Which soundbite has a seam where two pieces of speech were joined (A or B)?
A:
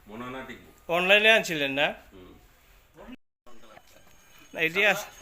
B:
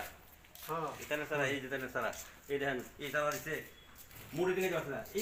A